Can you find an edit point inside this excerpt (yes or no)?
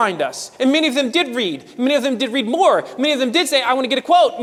no